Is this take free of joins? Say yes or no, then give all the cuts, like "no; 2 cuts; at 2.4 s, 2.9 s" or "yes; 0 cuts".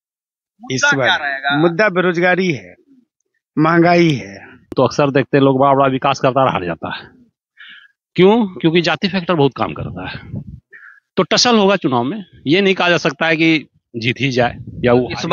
no; 1 cut; at 4.7 s